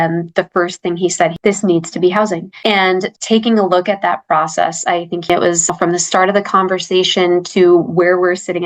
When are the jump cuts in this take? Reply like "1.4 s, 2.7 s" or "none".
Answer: 5.3 s